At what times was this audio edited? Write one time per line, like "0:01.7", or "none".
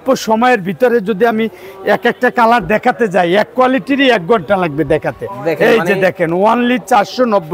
none